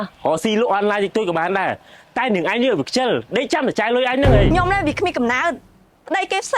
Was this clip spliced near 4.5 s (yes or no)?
yes